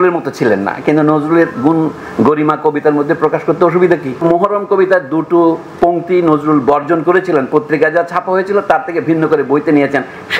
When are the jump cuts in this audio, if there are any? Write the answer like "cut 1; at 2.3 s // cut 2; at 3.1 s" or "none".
cut 1; at 4.2 s